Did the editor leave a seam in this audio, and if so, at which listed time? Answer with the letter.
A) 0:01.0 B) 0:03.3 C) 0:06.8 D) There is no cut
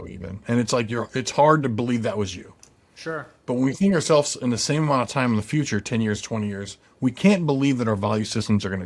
D